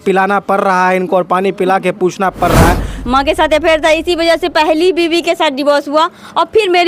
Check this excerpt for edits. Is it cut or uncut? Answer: cut